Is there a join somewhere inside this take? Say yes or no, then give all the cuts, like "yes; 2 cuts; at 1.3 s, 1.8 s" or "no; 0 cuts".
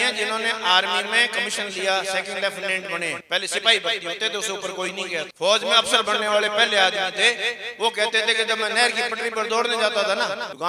no; 0 cuts